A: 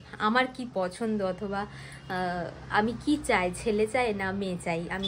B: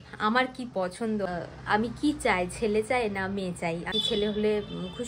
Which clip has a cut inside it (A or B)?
B